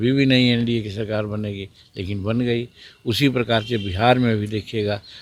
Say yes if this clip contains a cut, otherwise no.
no